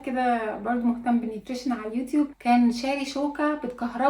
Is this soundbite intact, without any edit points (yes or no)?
yes